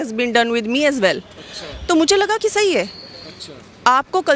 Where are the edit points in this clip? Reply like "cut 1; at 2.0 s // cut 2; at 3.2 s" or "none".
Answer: none